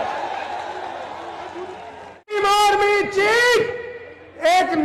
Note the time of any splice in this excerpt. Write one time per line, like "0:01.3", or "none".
0:02.4